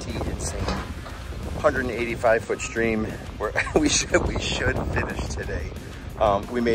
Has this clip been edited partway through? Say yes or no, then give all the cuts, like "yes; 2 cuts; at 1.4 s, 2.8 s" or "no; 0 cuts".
no; 0 cuts